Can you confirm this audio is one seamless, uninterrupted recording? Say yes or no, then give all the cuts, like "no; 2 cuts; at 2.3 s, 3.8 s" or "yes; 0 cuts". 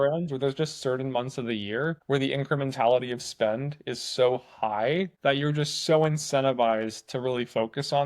no; 2 cuts; at 2.0 s, 5.1 s